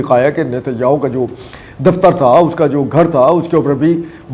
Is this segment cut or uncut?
uncut